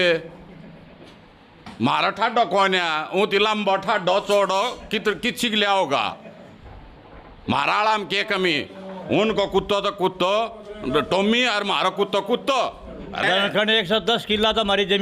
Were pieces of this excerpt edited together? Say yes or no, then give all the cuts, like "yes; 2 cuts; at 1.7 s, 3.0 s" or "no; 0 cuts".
yes; 1 cut; at 13.2 s